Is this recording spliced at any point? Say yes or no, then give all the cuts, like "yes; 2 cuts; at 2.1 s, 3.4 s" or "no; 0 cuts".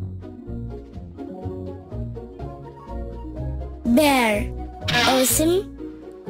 no; 0 cuts